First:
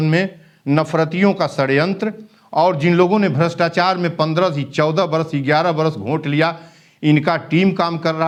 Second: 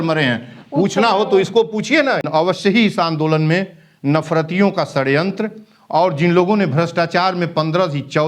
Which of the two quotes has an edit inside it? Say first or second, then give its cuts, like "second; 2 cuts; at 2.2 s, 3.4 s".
second; 1 cut; at 2.3 s